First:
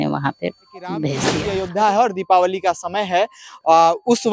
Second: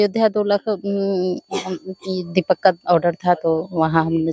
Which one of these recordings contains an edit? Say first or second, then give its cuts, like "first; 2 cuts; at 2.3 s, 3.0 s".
first; 1 cut; at 1.2 s